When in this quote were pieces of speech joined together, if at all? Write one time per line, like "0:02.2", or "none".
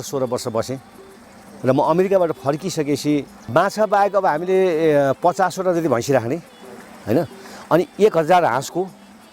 0:03.3